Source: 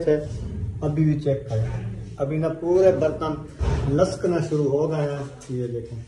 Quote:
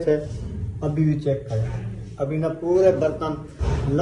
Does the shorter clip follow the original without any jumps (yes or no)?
yes